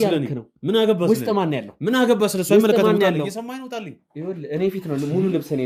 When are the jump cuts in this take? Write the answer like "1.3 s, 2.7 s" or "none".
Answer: none